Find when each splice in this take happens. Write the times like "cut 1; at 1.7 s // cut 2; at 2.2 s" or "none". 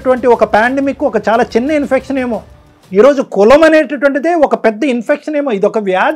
none